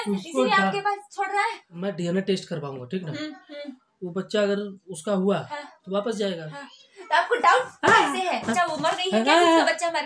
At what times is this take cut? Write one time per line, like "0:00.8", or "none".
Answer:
0:01.8
0:08.5